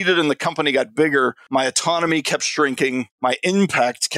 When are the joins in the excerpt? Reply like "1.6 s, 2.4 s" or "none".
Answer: 1.4 s, 3.1 s